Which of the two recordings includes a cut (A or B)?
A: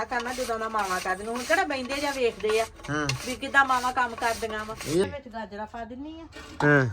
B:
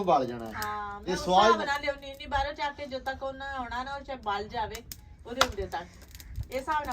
A